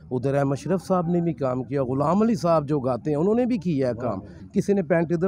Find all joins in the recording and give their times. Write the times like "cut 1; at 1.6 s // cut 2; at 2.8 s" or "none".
cut 1; at 4.4 s